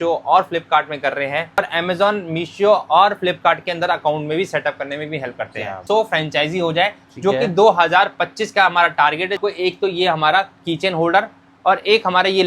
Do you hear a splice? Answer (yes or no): yes